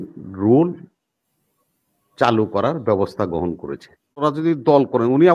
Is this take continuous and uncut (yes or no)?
no